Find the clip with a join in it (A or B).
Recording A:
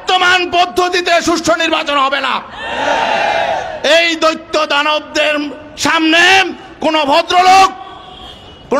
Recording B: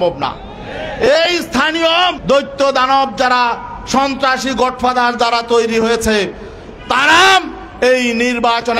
B